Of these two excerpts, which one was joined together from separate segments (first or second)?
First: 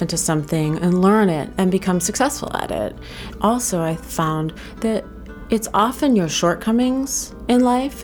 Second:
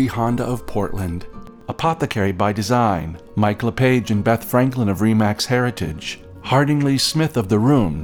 first